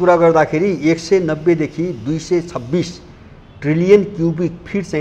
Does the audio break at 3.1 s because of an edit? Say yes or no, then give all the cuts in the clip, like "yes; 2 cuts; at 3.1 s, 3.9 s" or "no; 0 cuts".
no; 0 cuts